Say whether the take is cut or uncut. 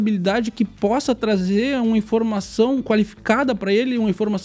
uncut